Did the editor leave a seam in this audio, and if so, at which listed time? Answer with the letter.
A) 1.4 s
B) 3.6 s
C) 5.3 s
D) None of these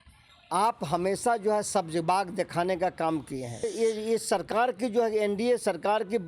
B